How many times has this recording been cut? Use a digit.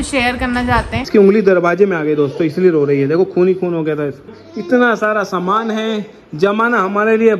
2